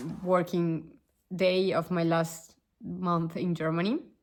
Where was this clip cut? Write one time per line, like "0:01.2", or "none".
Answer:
none